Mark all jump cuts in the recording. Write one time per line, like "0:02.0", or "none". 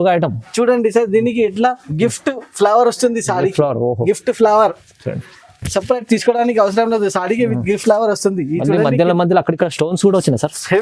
none